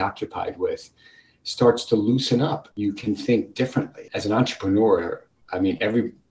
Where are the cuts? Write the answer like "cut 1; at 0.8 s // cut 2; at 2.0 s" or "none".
cut 1; at 2.7 s // cut 2; at 4.1 s